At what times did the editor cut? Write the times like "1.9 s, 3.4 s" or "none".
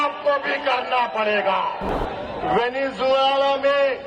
1.9 s